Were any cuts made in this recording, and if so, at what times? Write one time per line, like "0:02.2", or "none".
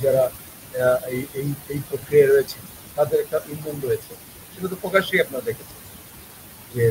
none